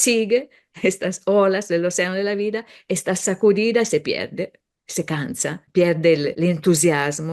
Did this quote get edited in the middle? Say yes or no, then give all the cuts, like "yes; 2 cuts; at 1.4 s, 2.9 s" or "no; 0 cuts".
yes; 2 cuts; at 5.6 s, 6.3 s